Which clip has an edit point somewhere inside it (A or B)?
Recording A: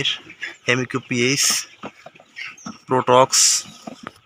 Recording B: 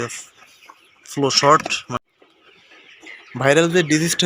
B